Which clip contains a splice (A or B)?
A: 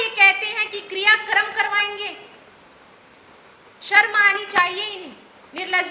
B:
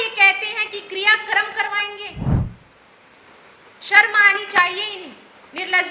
B